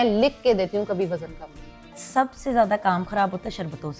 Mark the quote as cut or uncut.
cut